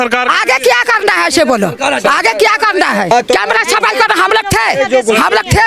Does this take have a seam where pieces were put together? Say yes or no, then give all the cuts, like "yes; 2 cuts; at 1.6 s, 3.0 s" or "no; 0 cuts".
yes; 1 cut; at 3.1 s